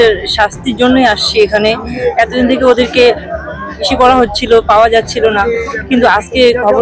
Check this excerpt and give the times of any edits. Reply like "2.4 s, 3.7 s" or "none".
none